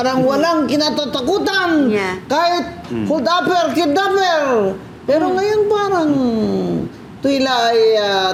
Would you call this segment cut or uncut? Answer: uncut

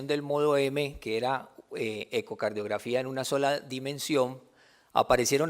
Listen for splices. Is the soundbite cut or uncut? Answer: cut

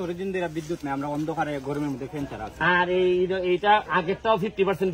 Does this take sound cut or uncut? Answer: uncut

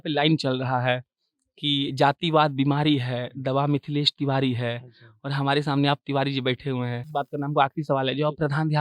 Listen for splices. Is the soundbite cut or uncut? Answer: cut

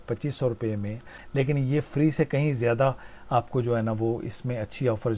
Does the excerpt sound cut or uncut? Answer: cut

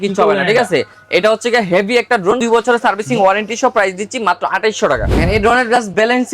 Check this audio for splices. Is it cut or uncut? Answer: cut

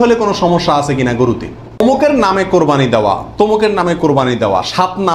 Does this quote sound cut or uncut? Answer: cut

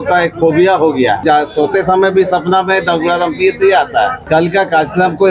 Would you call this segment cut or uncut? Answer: cut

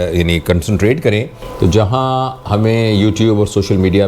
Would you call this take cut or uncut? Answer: cut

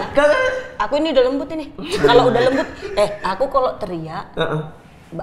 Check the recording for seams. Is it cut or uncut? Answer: uncut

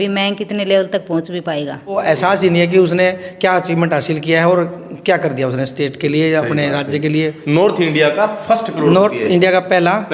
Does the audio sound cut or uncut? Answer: cut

